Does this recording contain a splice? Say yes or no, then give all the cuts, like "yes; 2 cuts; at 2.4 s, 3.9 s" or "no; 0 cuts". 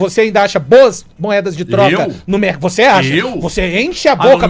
no; 0 cuts